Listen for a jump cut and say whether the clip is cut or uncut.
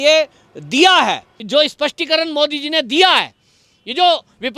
cut